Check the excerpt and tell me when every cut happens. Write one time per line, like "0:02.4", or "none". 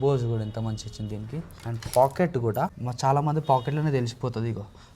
0:02.8

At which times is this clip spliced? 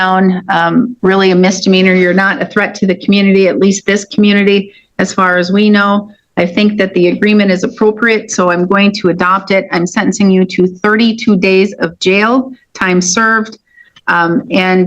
0:00.9

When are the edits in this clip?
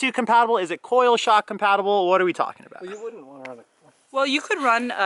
none

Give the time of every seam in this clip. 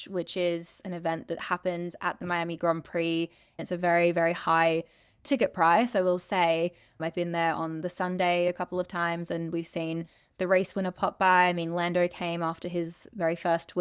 0:03.6
0:06.9
0:08.5

